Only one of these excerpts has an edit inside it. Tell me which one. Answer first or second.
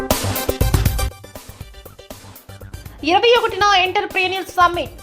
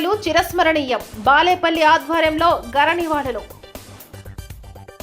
first